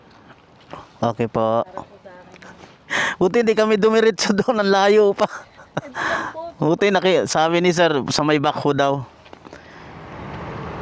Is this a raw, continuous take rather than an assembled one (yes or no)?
no